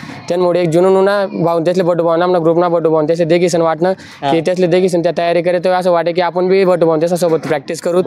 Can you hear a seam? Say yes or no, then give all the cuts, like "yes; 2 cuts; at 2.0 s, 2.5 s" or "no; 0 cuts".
no; 0 cuts